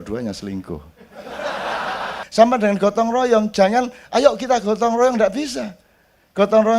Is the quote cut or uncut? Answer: cut